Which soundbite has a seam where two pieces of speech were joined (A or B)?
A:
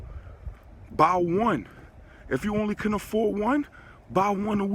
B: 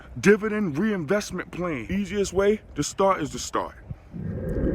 B